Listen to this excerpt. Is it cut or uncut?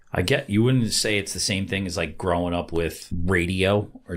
cut